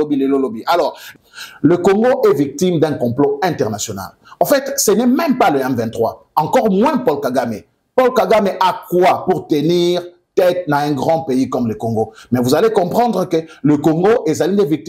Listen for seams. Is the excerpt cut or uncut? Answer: cut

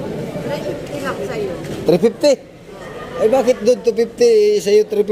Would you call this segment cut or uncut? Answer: uncut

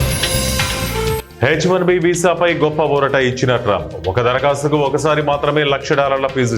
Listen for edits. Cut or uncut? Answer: cut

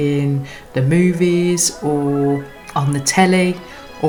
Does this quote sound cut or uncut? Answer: uncut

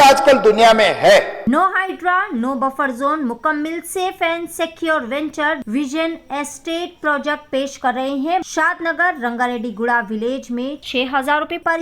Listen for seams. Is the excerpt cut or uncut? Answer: cut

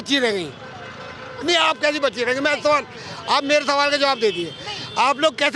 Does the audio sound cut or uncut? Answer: uncut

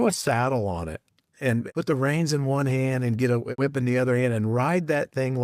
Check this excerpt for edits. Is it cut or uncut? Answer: cut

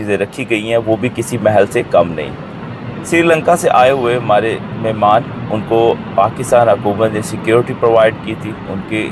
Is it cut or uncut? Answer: uncut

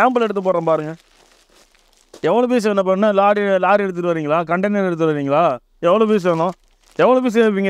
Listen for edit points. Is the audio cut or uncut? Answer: uncut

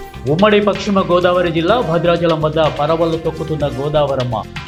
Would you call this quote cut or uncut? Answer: uncut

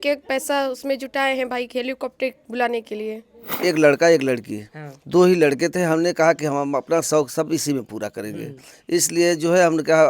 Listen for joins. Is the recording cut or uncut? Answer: cut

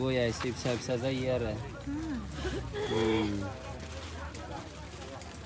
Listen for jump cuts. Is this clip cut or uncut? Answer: uncut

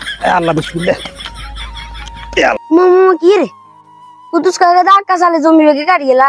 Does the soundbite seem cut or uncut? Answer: cut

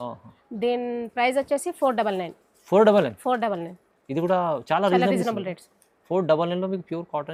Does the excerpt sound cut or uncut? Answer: uncut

